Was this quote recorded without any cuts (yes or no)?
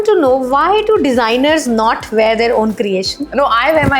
yes